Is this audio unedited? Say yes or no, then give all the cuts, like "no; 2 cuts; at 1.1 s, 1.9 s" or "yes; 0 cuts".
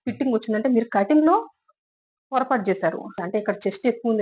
no; 1 cut; at 3.2 s